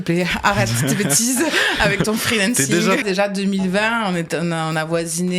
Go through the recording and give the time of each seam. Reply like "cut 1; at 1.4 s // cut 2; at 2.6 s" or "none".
cut 1; at 3.0 s